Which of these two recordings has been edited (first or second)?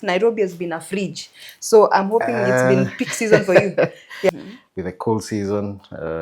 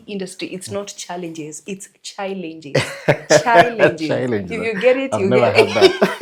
first